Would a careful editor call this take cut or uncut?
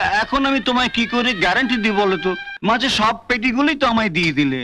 cut